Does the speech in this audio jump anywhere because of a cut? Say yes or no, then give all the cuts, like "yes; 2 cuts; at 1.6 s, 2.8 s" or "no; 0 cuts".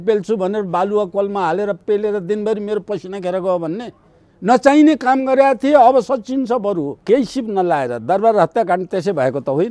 yes; 1 cut; at 7.0 s